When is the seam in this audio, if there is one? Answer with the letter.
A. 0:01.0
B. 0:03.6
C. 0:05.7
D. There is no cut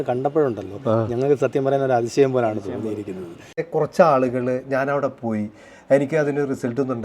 B